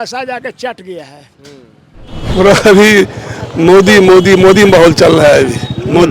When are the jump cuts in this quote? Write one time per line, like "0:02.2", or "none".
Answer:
0:02.1